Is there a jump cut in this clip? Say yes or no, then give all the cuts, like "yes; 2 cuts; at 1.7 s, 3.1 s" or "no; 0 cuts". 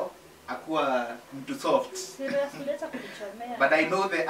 no; 0 cuts